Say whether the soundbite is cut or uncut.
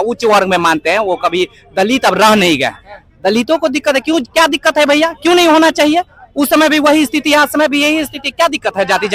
uncut